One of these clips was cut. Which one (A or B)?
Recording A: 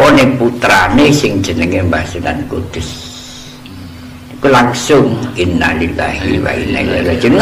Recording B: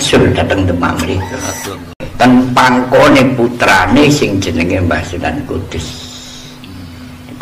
B